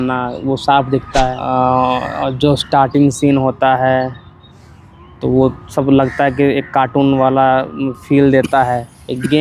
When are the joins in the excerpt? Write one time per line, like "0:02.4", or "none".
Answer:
0:01.4